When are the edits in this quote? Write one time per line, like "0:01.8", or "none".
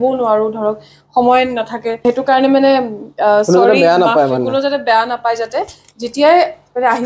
0:02.1

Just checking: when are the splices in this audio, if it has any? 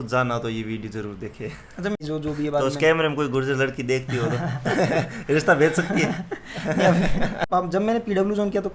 0:02.0
0:07.5

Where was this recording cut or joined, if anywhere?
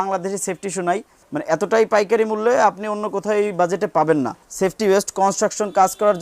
0:01.2
0:04.4

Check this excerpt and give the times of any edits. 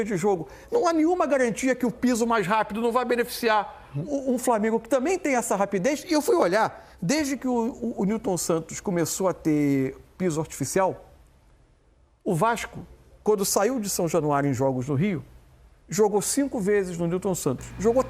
none

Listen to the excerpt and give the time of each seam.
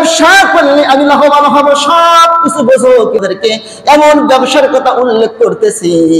0:03.2

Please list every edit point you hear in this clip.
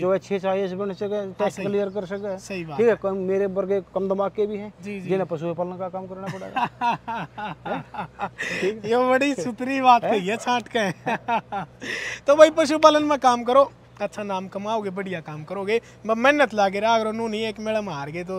none

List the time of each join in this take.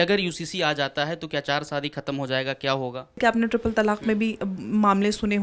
0:03.0

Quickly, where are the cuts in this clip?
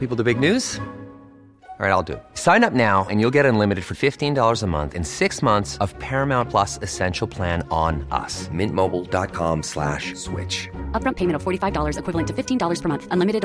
none

